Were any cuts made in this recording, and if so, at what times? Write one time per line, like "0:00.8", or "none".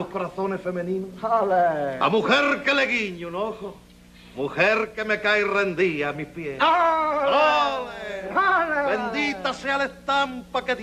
0:02.6